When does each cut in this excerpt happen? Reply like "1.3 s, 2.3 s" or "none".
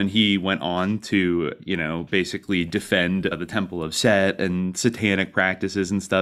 none